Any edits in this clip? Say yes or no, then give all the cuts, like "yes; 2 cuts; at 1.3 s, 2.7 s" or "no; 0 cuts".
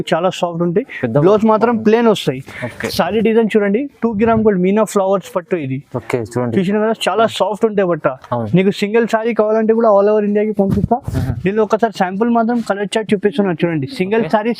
no; 0 cuts